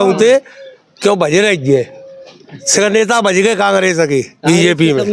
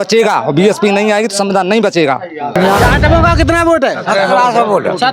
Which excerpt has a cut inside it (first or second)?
second